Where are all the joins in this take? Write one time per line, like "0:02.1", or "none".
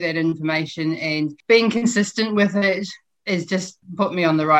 0:01.4
0:03.3